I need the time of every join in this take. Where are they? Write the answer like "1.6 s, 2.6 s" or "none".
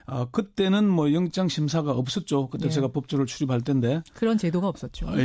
4.0 s

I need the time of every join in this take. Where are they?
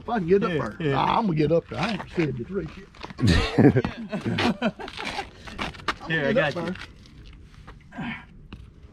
none

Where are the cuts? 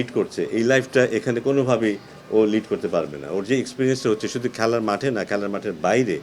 none

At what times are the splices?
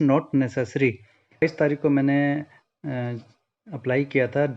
1.4 s

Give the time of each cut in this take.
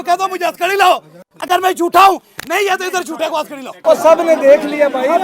3.8 s

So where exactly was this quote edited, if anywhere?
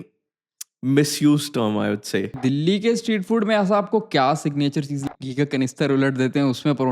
2.4 s, 5.1 s

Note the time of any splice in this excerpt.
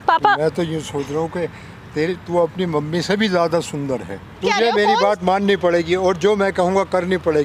4.4 s

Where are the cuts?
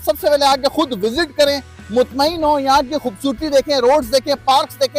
none

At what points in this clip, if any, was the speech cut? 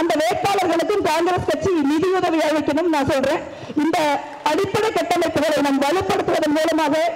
none

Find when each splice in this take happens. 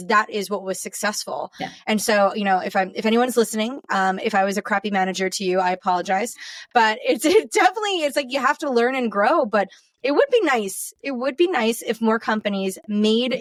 none

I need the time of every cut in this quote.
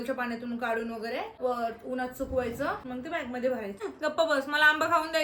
1.3 s, 2.8 s, 3.8 s

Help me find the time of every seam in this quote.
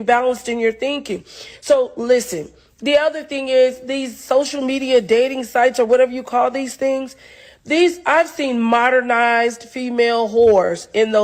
none

